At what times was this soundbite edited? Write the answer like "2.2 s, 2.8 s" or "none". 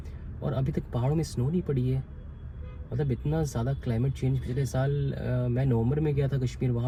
none